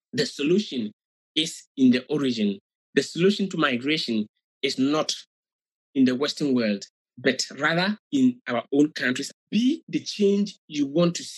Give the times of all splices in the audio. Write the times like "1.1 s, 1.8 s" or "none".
9.3 s